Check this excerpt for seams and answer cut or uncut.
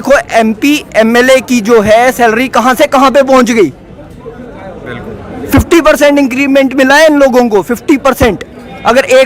uncut